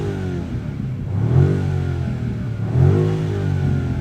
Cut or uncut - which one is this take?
uncut